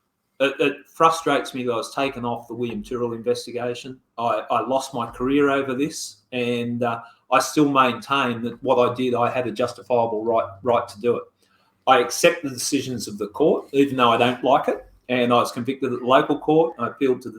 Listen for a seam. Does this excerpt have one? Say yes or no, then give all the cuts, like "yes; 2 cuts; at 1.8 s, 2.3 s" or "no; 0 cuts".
no; 0 cuts